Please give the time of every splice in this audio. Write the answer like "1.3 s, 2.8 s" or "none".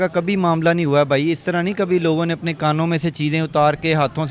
none